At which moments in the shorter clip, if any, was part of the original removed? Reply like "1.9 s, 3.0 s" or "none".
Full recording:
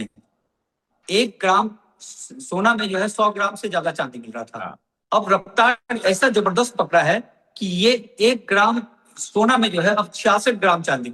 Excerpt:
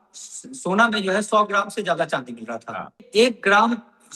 3.0 s

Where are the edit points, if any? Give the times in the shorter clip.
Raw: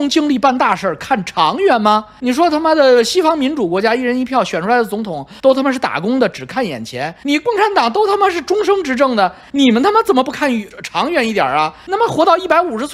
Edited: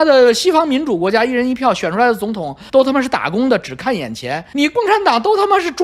none

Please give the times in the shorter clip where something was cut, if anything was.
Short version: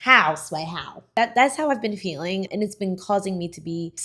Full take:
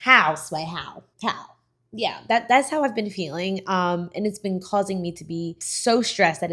1.1 s, 2.5 s

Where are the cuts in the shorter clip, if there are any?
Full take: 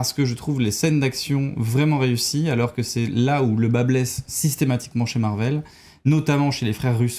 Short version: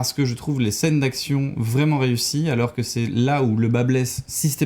none

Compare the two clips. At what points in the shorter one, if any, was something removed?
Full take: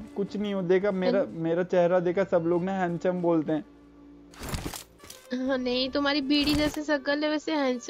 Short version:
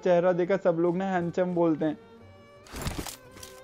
none

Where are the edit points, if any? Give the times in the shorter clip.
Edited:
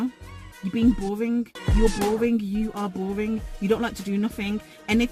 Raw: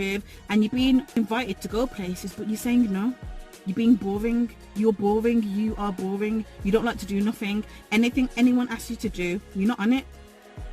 none

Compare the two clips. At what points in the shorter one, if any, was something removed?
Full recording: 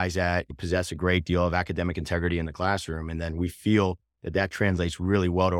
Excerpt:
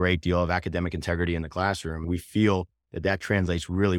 2.0 s

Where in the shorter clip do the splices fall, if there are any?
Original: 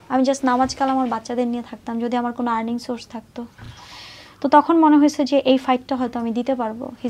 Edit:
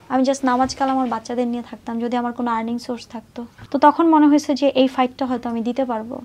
3.6 s

